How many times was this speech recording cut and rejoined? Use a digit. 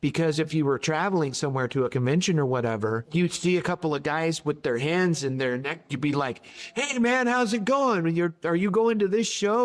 2